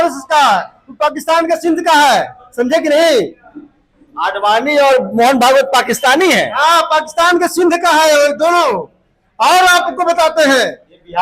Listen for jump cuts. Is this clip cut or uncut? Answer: uncut